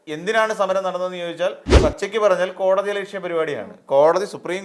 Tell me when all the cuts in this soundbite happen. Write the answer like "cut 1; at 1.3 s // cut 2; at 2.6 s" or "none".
cut 1; at 1.7 s